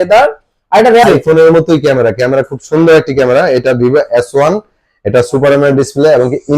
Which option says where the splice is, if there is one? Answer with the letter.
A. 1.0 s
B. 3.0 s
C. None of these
A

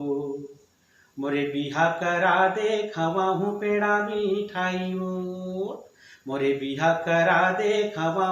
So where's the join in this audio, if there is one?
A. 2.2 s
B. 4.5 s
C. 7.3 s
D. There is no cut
D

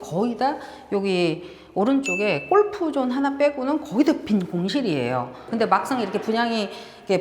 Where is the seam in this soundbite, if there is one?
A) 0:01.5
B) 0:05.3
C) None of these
B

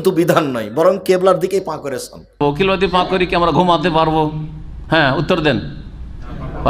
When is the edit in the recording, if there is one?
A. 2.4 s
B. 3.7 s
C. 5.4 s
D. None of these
A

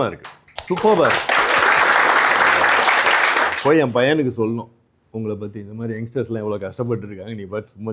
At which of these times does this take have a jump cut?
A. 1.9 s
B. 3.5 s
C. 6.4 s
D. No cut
B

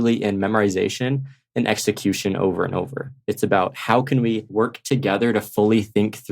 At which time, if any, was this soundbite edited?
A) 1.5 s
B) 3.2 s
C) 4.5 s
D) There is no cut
C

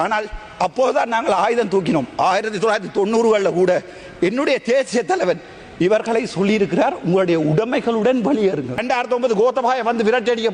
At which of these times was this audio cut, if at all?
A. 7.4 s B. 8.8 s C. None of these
B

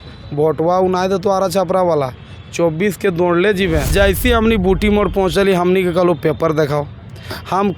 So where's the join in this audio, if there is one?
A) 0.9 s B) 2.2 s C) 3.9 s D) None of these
C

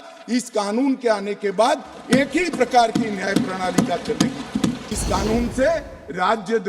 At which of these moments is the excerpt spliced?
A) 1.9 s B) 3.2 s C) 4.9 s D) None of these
C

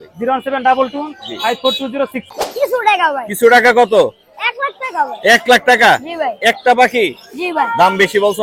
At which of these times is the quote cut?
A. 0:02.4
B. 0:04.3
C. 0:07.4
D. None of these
A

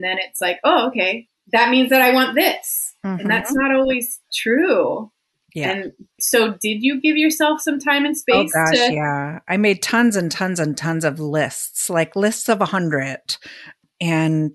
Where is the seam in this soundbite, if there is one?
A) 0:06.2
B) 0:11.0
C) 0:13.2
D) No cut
A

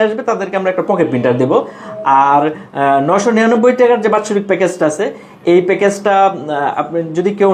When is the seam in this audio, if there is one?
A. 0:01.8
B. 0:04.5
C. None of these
C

